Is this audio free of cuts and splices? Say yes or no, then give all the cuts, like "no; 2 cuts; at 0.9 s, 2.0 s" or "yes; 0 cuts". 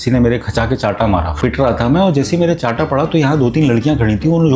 no; 1 cut; at 1.4 s